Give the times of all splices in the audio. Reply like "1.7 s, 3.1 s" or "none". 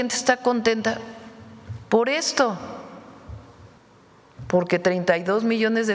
3.8 s